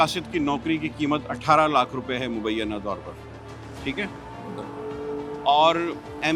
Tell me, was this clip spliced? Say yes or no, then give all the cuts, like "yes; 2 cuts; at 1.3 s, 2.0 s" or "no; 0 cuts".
no; 0 cuts